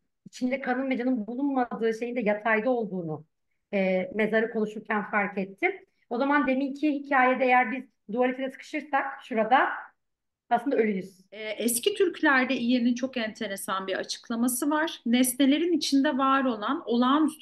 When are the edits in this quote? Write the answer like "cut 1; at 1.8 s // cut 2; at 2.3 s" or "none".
cut 1; at 11.5 s

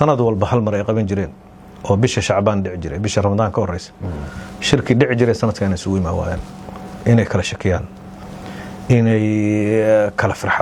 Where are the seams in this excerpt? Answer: none

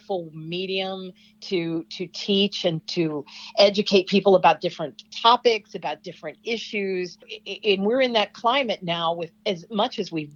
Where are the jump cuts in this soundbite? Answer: none

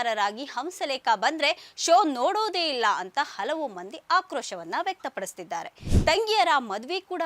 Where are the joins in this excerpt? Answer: cut 1; at 5.9 s

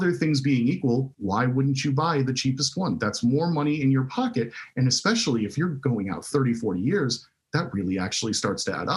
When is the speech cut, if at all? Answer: cut 1; at 1.1 s

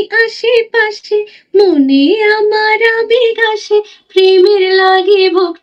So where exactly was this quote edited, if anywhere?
none

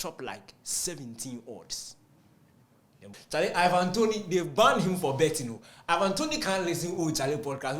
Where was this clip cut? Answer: cut 1; at 3.2 s

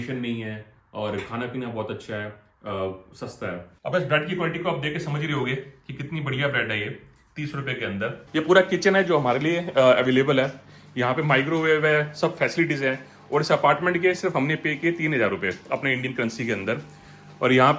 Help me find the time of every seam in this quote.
none

